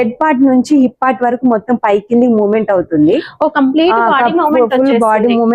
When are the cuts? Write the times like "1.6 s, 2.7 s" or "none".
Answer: none